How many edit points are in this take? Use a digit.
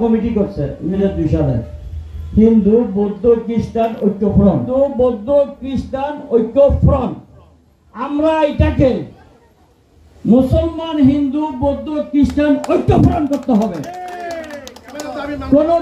2